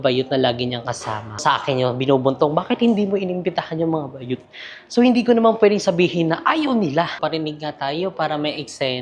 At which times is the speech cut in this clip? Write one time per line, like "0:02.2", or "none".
0:01.4
0:07.2